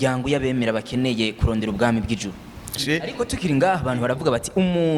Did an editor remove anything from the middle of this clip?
yes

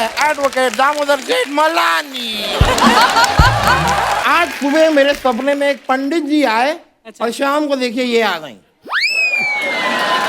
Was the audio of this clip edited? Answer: yes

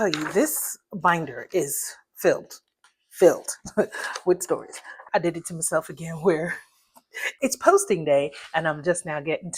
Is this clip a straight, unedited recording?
no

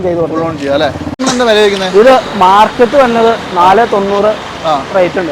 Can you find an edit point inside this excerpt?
yes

